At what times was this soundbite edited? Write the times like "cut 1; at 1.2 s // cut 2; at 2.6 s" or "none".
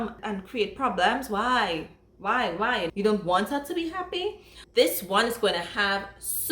cut 1; at 4.6 s